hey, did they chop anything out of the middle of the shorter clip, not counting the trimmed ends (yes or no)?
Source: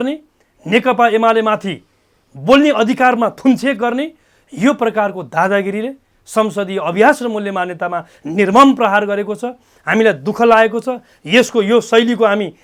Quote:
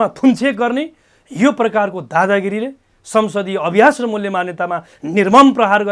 no